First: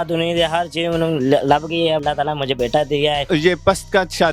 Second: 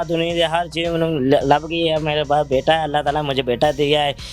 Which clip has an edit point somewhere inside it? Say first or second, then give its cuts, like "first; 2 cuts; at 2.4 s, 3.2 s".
first; 2 cuts; at 2.0 s, 3.3 s